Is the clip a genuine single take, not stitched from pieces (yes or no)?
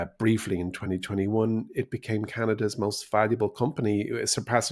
yes